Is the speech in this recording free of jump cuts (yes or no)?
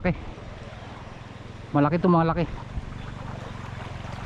yes